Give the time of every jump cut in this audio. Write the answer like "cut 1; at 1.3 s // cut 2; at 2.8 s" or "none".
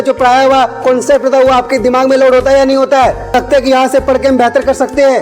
cut 1; at 3.3 s